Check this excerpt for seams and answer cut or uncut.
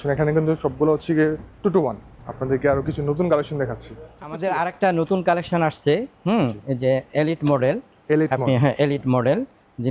uncut